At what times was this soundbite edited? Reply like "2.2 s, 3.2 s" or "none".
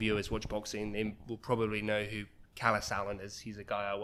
none